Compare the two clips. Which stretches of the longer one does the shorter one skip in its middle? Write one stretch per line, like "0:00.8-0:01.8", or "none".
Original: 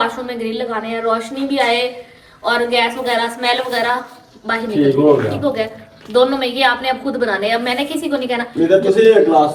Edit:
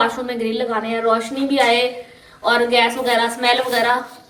none